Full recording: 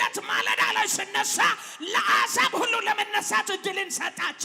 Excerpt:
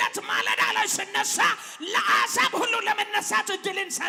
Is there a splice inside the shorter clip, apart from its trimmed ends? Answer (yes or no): no